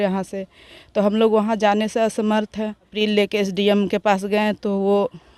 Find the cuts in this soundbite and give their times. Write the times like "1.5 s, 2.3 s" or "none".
2.9 s